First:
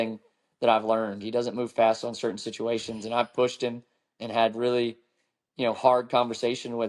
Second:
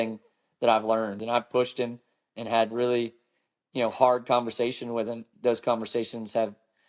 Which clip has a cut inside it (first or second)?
second